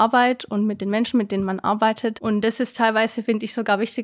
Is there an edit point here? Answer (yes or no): yes